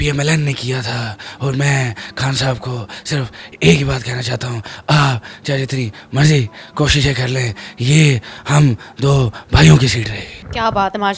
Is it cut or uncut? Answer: uncut